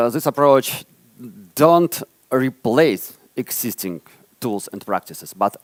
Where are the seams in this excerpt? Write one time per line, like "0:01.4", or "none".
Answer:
none